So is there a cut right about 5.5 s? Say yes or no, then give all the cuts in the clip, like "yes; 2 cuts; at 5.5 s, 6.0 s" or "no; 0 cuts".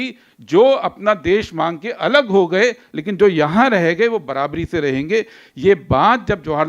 no; 0 cuts